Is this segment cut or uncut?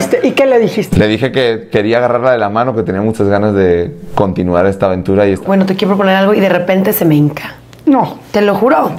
cut